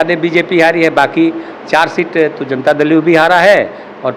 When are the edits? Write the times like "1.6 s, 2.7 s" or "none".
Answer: none